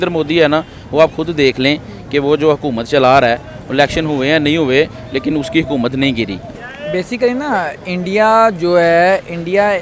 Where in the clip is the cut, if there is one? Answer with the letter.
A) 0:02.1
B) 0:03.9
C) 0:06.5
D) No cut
C